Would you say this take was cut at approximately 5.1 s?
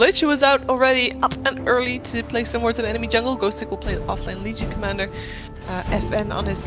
no; 0 cuts

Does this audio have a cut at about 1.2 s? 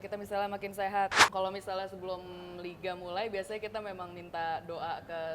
yes; 1 cut; at 1.2 s

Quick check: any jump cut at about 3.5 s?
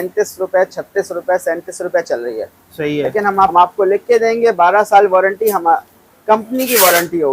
yes; 1 cut; at 3.5 s

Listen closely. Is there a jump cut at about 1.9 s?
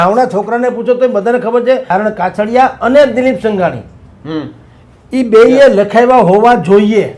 yes; 1 cut; at 1.9 s

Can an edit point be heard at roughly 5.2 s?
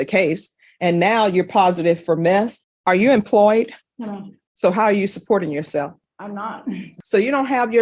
no; 2 cuts; at 2.6 s, 6.9 s

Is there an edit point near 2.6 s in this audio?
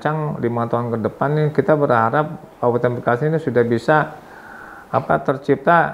no; 0 cuts

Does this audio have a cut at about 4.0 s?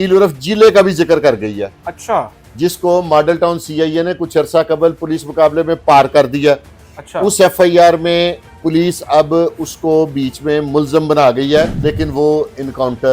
no; 1 cut; at 11.7 s

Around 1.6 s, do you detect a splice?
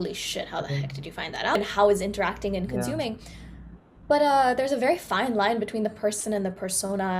yes; 1 cut; at 1.6 s

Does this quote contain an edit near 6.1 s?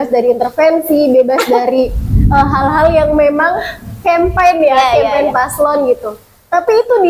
no; 0 cuts

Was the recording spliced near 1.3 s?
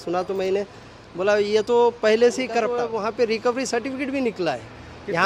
no; 1 cut; at 2.7 s

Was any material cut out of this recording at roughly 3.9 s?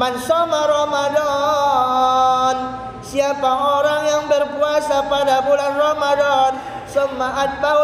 no; 0 cuts

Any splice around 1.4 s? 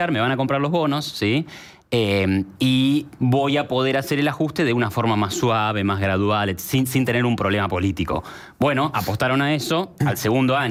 no; 0 cuts

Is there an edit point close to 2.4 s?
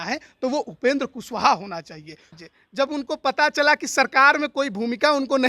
yes; 1 cut; at 2.4 s

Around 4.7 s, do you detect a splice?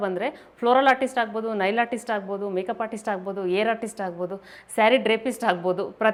no; 0 cuts

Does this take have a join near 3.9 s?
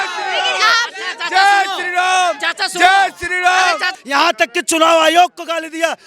yes; 1 cut; at 3.9 s

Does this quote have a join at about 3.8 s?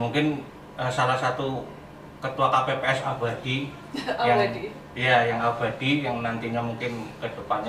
no; 0 cuts

